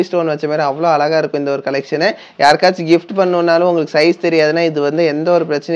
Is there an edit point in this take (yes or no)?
no